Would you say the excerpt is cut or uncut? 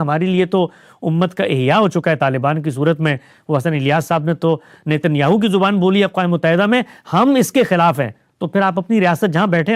uncut